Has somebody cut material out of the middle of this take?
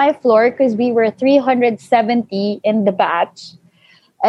no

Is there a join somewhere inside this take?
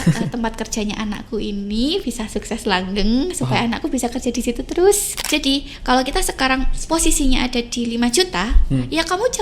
yes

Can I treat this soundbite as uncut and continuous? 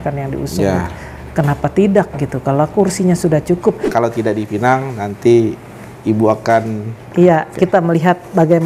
no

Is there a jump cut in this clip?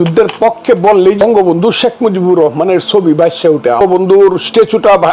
yes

